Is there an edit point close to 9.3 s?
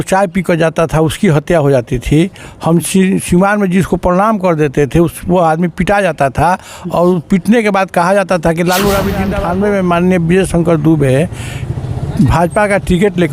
yes; 1 cut; at 9.3 s

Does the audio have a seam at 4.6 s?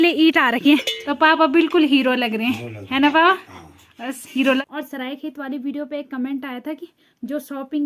yes; 2 cuts; at 1.0 s, 4.6 s

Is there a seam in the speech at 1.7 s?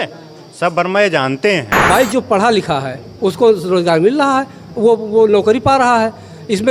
yes; 1 cut; at 1.7 s

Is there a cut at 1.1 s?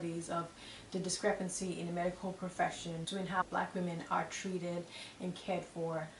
no; 1 cut; at 3.4 s

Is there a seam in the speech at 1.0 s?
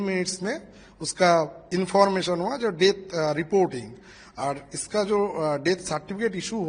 no; 0 cuts

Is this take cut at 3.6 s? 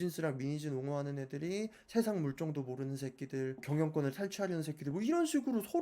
yes; 1 cut; at 3.6 s

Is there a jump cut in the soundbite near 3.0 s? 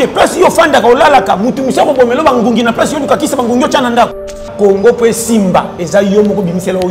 no; 1 cut; at 4.5 s

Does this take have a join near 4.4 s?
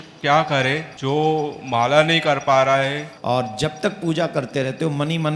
no; 2 cuts; at 0.9 s, 3.1 s

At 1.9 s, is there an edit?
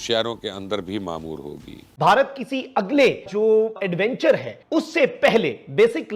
yes; 1 cut; at 1.9 s

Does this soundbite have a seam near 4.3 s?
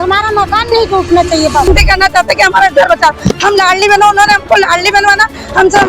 no; 1 cut; at 1.7 s

